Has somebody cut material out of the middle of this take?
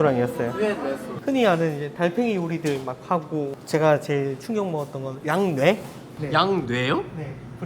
yes; 3 cuts; at 1.1 s, 5.1 s, 6.1 s

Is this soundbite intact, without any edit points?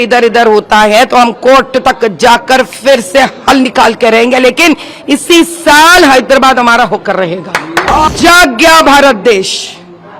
no; 1 cut; at 8.1 s

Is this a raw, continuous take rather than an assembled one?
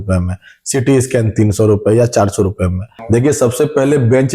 no; 1 cut; at 2.9 s

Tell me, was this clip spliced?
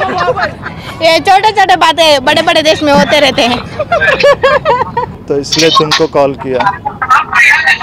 yes; 1 cut; at 5.2 s

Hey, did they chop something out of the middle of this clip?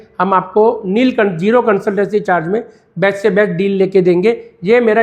no; 0 cuts

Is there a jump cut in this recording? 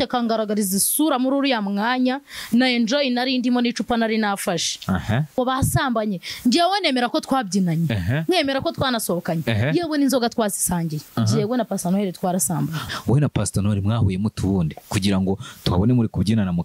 yes; 3 cuts; at 5.4 s, 11.0 s, 12.8 s

